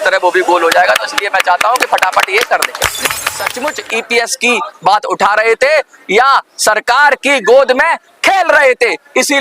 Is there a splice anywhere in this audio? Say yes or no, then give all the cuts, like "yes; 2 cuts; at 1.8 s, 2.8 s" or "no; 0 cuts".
yes; 1 cut; at 3.5 s